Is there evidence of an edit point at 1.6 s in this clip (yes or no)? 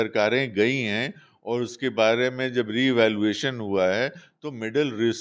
no